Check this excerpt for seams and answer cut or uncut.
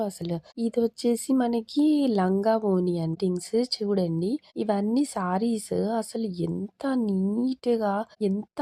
cut